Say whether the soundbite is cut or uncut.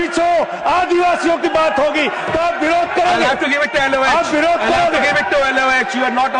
uncut